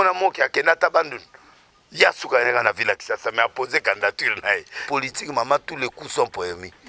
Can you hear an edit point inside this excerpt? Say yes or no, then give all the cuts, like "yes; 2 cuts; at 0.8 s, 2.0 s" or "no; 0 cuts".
yes; 1 cut; at 4.8 s